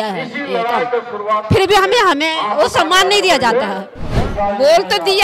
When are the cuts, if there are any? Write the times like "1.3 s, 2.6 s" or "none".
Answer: 4.2 s